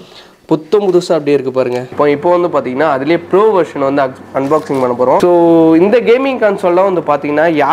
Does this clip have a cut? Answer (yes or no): yes